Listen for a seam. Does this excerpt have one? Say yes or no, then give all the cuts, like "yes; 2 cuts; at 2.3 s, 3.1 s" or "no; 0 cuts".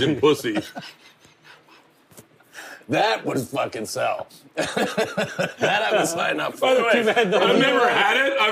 no; 0 cuts